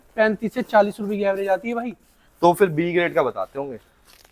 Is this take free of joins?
yes; 0 cuts

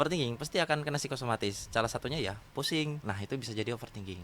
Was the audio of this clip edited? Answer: yes; 1 cut; at 3.1 s

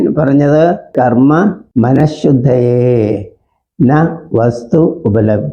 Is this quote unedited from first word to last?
no; 2 cuts; at 0.9 s, 1.6 s

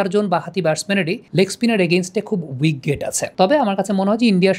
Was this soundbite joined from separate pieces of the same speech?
yes; 2 cuts; at 1.2 s, 3.2 s

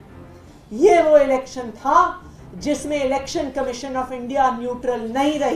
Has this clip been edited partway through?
no; 0 cuts

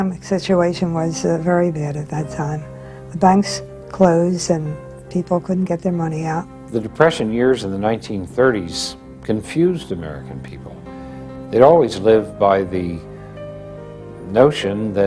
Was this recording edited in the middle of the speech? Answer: yes; 1 cut; at 3.1 s

